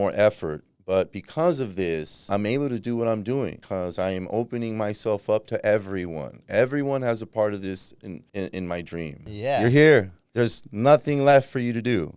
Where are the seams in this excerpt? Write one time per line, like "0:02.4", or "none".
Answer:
0:02.2
0:03.6
0:08.1
0:09.3